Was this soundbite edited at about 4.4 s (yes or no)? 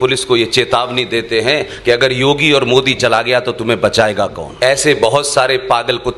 yes